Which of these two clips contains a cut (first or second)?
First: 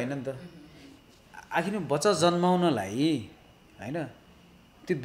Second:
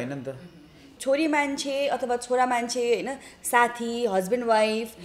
second